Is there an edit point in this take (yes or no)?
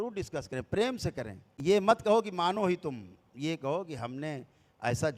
no